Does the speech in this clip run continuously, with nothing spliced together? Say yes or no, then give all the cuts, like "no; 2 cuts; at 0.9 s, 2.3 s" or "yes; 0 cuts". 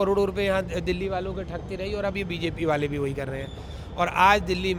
yes; 0 cuts